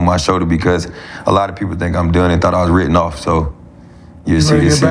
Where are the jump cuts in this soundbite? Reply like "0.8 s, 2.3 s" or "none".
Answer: none

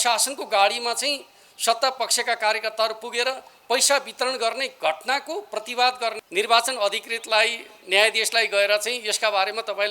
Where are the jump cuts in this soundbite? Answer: 6.2 s

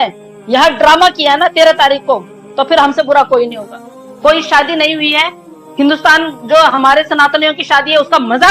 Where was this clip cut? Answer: none

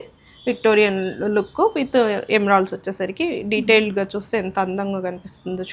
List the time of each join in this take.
none

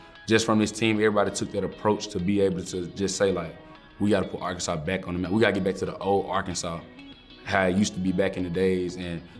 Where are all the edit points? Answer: none

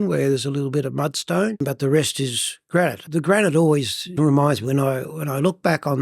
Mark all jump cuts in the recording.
1.6 s, 3.0 s, 4.1 s

